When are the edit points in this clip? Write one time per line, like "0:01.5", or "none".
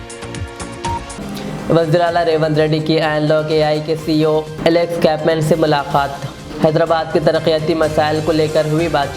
0:01.1